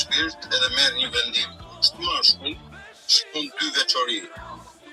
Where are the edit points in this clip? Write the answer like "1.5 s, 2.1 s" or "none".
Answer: none